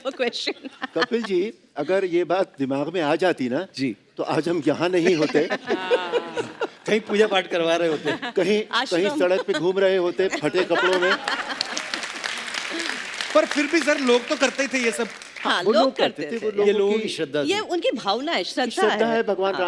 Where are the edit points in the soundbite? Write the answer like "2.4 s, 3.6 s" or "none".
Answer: none